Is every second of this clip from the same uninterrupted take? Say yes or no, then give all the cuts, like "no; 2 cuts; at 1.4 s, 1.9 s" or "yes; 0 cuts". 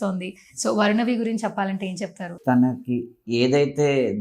no; 1 cut; at 2.3 s